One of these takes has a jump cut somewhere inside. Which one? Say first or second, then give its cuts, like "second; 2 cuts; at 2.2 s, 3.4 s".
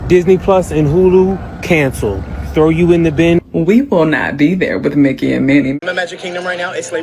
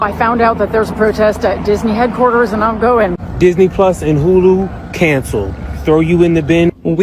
first; 1 cut; at 5.8 s